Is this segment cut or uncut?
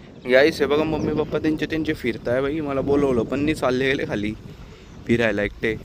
uncut